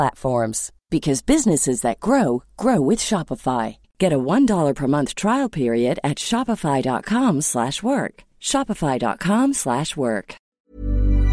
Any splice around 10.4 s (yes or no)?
yes